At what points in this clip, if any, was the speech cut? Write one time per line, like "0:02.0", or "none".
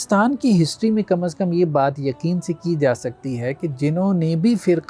none